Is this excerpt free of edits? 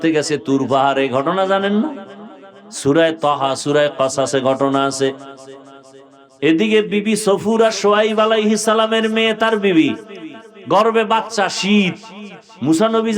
yes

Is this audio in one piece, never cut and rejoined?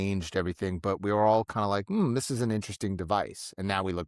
yes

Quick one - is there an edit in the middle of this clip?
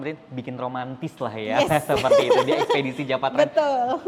no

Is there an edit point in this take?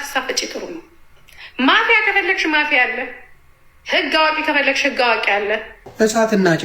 yes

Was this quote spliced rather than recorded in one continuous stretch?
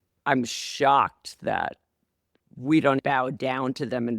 yes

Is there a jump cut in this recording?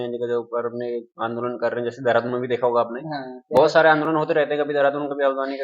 no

